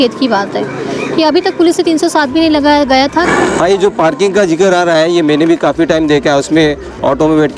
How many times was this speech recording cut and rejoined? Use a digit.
1